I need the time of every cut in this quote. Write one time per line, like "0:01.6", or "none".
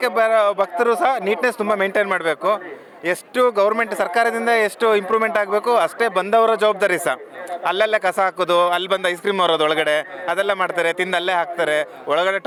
none